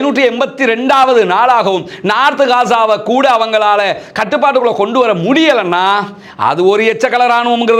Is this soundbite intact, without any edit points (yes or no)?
yes